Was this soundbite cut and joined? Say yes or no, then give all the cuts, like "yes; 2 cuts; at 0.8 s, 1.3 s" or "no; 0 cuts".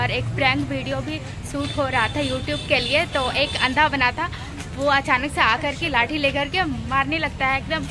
no; 0 cuts